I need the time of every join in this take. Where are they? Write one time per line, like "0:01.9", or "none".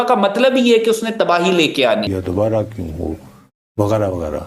0:02.1